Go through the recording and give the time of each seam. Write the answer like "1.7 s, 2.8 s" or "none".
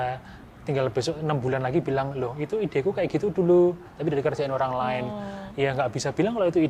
none